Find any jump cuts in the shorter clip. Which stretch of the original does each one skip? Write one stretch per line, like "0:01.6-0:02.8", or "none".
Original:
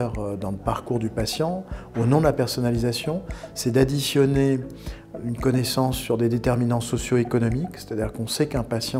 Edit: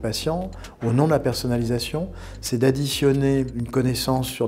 0:04.7-0:05.3